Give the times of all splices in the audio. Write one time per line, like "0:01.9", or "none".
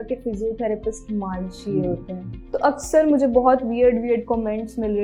0:02.3